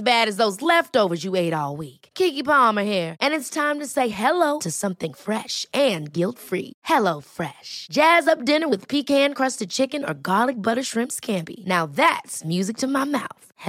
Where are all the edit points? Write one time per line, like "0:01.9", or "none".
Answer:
none